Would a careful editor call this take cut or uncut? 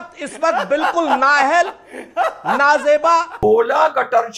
cut